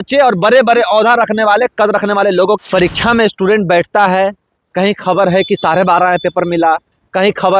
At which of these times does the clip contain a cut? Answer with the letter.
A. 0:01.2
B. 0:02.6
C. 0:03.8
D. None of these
B